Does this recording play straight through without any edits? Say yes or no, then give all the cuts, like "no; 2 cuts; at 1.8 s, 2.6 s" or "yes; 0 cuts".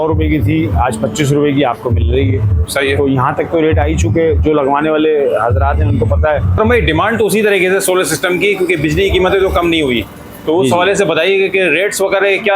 yes; 0 cuts